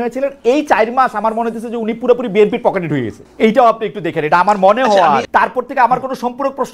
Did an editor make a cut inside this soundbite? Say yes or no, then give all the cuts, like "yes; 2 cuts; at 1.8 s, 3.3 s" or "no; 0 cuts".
yes; 2 cuts; at 3.2 s, 5.3 s